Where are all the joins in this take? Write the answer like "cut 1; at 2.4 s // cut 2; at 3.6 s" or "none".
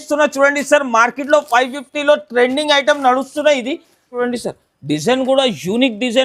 cut 1; at 4.2 s